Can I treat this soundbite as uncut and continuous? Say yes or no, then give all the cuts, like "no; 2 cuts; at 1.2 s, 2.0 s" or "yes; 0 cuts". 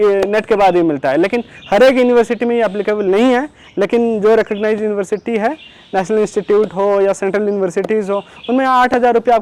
yes; 0 cuts